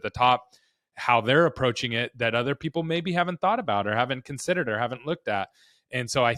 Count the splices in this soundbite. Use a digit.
0